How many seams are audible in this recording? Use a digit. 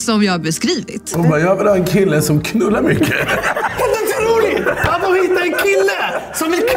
2